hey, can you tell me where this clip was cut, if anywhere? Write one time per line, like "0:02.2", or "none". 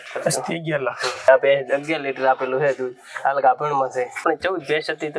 0:01.3
0:04.2